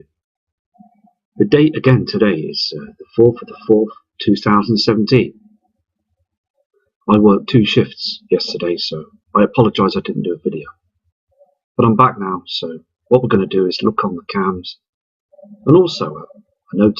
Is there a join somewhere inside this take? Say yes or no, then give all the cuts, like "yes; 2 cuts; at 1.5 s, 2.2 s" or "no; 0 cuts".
yes; 1 cut; at 9.7 s